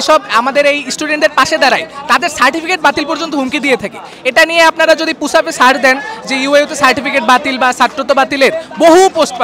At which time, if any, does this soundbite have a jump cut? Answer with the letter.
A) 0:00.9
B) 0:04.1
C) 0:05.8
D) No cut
D